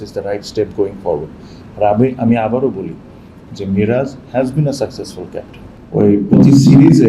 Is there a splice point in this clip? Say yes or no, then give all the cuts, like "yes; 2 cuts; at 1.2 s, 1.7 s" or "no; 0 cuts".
yes; 1 cut; at 5.7 s